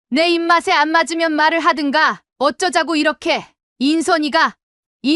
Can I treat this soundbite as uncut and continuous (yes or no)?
no